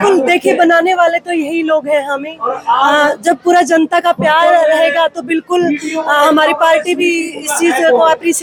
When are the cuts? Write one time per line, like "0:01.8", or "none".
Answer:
none